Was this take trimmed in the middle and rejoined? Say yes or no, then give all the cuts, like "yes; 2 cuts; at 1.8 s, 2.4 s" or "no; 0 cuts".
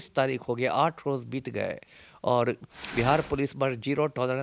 no; 0 cuts